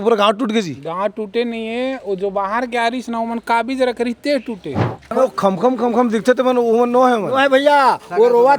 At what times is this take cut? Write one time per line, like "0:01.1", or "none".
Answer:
0:05.1